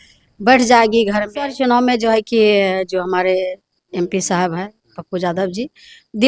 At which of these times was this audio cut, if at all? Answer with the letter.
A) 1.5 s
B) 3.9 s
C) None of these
A